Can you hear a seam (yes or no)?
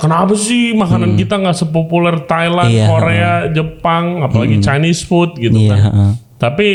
no